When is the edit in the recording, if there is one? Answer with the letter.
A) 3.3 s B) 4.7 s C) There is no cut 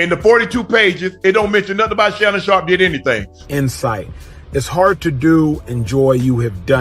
A